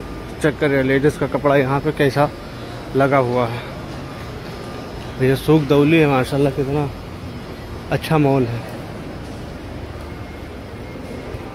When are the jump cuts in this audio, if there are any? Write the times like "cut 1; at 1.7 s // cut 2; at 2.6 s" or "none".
none